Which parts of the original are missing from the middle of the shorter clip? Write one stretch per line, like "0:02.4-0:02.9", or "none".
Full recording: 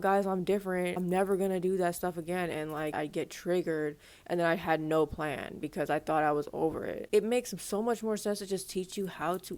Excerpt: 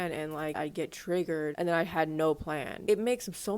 0:03.9-0:04.3
0:05.5-0:07.0

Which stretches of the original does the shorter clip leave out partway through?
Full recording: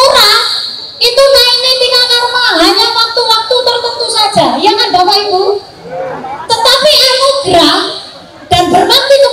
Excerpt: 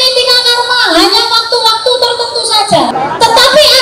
0:04.6-0:06.2

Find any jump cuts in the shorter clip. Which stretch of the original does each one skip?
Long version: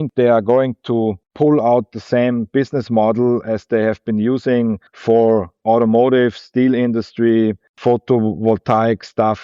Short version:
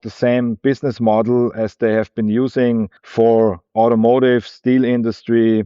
none

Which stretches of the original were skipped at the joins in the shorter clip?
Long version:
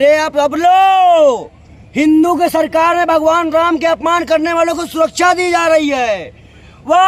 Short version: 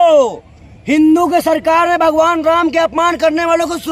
none

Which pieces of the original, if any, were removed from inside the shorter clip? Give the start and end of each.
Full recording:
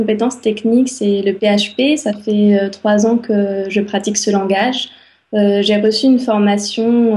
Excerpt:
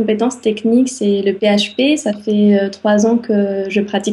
none

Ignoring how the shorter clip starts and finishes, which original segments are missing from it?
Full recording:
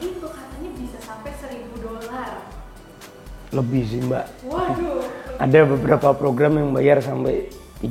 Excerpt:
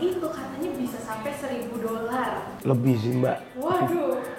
0:02.5-0:03.4

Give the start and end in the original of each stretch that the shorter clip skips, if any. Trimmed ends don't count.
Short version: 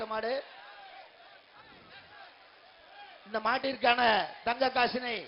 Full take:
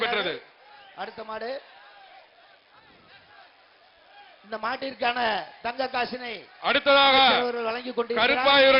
none

